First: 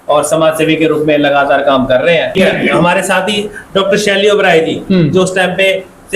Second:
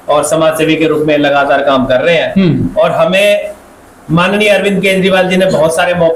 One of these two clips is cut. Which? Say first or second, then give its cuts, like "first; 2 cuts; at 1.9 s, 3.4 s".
first; 1 cut; at 2.3 s